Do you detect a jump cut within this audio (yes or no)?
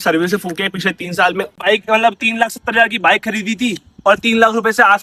yes